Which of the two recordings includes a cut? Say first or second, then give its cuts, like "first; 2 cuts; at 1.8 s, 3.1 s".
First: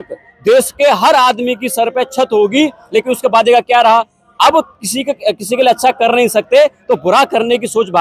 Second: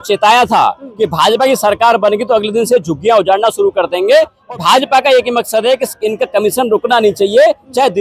second; 1 cut; at 4.4 s